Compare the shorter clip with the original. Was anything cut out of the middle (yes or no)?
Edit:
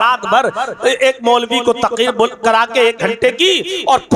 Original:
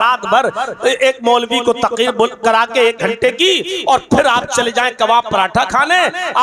no